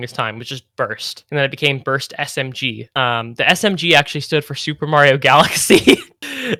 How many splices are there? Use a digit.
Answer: 0